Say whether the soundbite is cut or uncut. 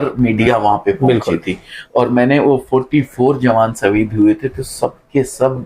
uncut